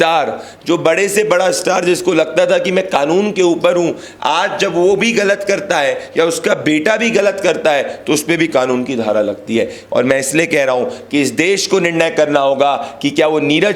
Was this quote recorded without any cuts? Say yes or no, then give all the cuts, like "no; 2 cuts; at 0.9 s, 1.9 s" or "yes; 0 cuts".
yes; 0 cuts